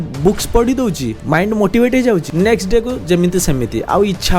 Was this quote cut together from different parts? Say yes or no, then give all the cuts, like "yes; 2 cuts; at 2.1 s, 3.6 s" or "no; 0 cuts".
yes; 2 cuts; at 1.1 s, 2.3 s